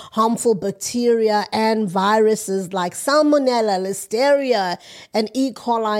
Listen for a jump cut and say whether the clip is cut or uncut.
uncut